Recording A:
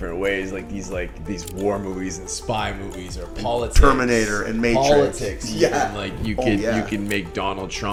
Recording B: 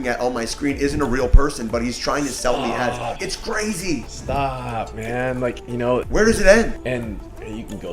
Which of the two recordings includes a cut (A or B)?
B